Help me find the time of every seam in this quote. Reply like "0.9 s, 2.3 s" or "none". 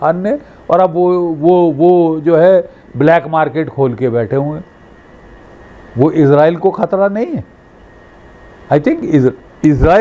none